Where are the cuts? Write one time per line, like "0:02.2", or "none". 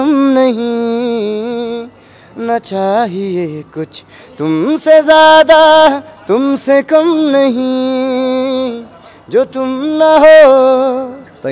none